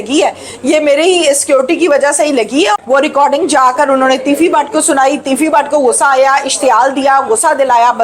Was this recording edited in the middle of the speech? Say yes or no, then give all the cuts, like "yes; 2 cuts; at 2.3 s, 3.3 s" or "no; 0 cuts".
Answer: yes; 1 cut; at 2.8 s